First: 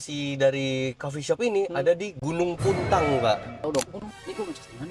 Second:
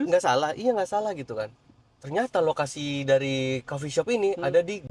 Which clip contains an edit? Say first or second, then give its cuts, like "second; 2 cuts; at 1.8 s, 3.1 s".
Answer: first; 1 cut; at 3.6 s